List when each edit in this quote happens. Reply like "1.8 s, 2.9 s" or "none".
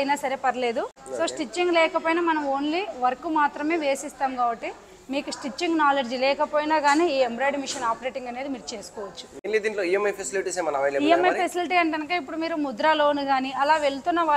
1.0 s, 9.5 s